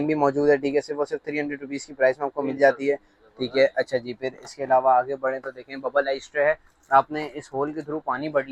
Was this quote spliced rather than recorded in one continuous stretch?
no; 0 cuts

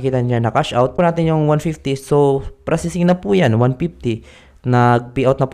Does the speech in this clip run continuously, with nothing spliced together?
no; 1 cut; at 0.9 s

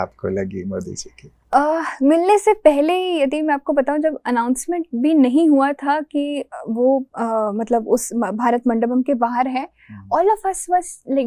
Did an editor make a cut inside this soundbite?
no; 0 cuts

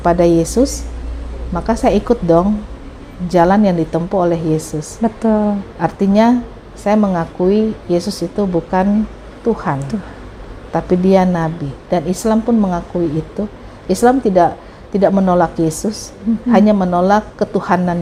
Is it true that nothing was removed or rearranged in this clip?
yes; 0 cuts

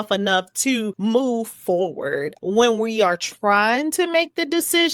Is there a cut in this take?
yes; 2 cuts; at 0.9 s, 2.3 s

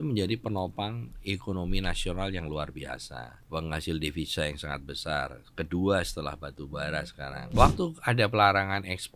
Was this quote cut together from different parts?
yes; 2 cuts; at 3.3 s, 7.6 s

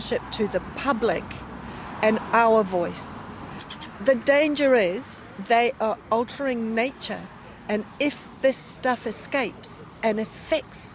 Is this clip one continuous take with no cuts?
no; 1 cut; at 3.6 s

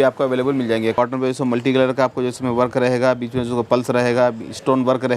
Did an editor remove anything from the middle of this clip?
yes; 1 cut; at 0.9 s

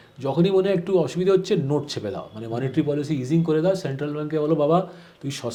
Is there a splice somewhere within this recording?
no; 0 cuts

